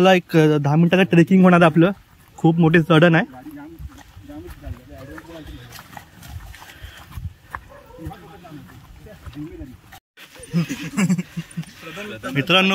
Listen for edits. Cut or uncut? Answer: uncut